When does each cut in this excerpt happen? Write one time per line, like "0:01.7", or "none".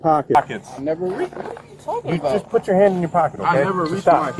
none